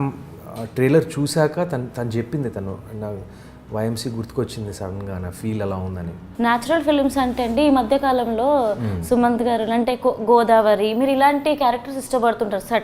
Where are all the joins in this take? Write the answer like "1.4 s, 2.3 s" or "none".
6.2 s